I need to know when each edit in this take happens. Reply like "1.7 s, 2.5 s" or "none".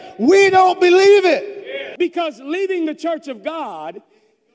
1.8 s

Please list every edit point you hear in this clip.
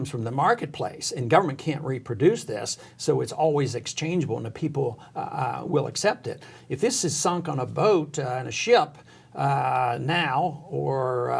none

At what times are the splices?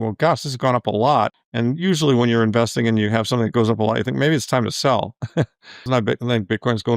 1.4 s, 5.9 s

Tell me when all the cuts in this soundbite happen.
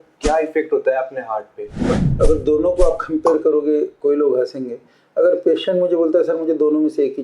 2.0 s

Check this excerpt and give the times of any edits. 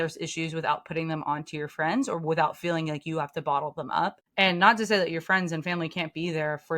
4.2 s

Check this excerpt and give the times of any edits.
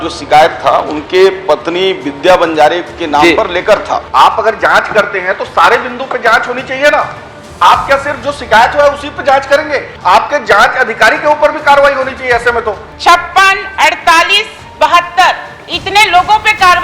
4.1 s, 9.9 s, 12.9 s

